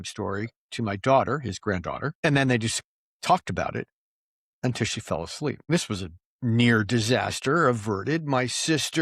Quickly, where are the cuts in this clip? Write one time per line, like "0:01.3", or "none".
0:02.1
0:05.7